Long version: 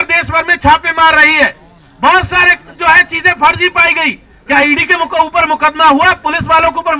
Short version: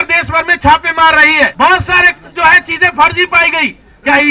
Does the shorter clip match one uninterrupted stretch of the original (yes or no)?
no